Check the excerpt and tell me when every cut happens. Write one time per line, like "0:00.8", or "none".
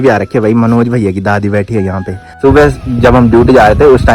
0:02.2